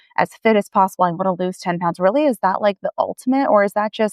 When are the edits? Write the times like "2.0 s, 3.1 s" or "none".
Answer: none